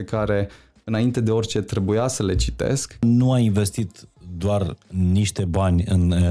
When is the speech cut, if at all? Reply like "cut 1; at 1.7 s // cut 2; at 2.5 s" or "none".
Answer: cut 1; at 3.0 s